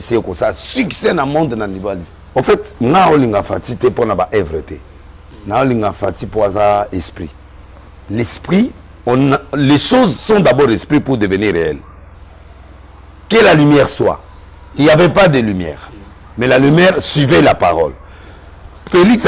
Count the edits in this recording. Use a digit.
1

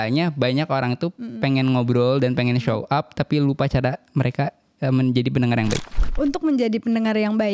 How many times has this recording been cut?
1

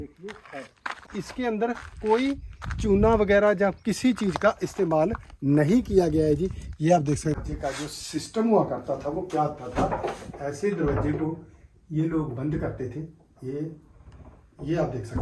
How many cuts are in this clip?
2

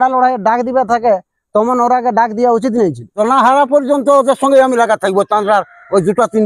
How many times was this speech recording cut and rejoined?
1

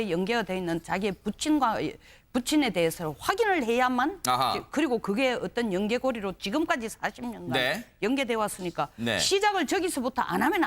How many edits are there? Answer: 1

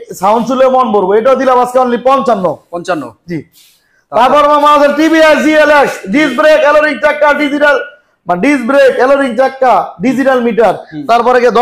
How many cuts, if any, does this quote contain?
0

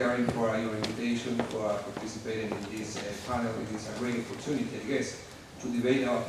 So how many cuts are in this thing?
0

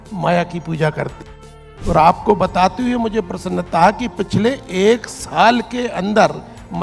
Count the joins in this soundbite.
1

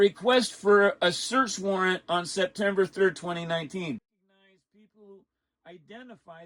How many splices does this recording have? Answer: 1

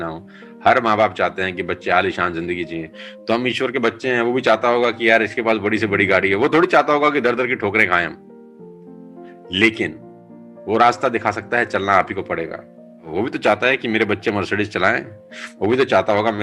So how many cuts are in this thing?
3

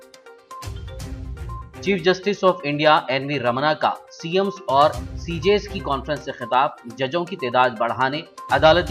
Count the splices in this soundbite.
1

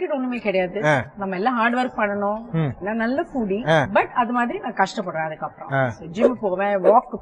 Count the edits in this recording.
3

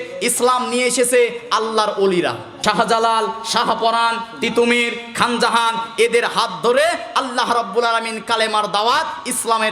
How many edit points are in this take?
1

